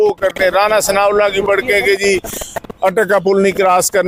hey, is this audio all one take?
yes; 0 cuts

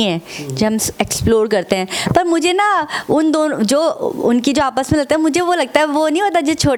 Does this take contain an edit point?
no; 0 cuts

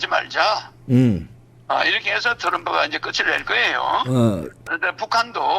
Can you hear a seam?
yes; 1 cut; at 4.6 s

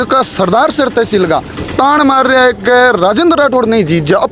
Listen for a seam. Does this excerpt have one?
no; 0 cuts

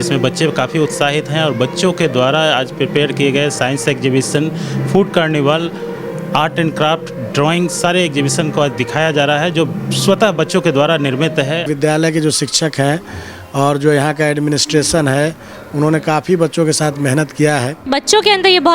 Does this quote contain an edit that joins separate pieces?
yes; 2 cuts; at 11.7 s, 17.8 s

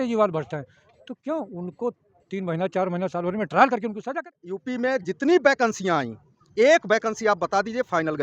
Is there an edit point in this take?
yes; 1 cut; at 4.4 s

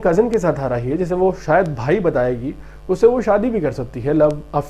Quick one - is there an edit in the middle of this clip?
no; 0 cuts

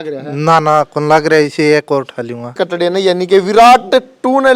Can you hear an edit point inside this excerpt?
yes; 1 cut; at 2.5 s

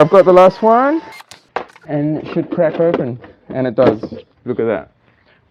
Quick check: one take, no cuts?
yes; 0 cuts

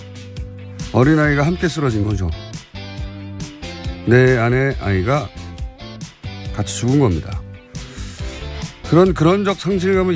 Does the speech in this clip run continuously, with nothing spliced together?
no; 1 cut; at 4.7 s

